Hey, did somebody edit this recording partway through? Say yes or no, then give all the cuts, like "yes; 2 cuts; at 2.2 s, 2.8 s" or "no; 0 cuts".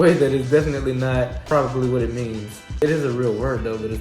yes; 2 cuts; at 1.4 s, 2.8 s